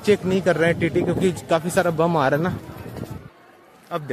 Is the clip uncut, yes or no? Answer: yes